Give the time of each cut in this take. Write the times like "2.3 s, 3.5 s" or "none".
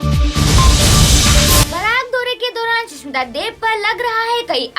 1.6 s

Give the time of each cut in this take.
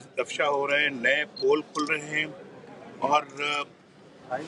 none

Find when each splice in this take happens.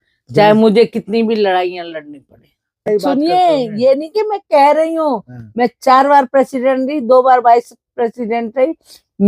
2.8 s

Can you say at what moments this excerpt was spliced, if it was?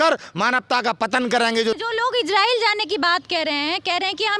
1.8 s

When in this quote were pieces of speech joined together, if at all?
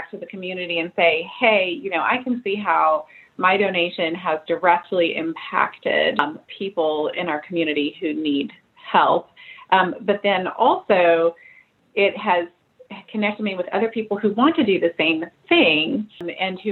6.2 s

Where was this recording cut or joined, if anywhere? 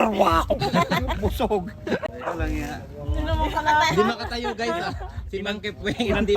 2.1 s

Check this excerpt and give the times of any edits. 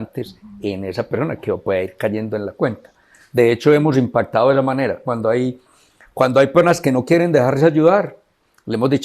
none

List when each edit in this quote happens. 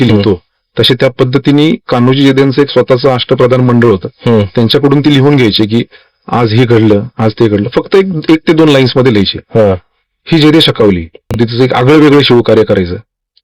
11.4 s

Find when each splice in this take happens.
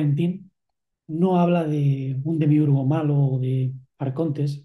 none

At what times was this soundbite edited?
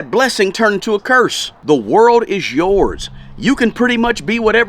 1.5 s

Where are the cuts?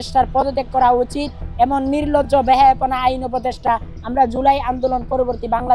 none

